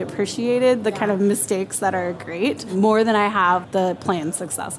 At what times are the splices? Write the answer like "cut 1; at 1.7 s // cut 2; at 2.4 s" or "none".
cut 1; at 2.7 s